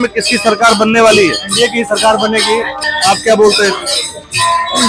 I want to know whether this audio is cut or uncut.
cut